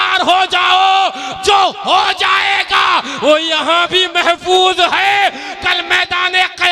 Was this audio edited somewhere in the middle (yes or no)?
no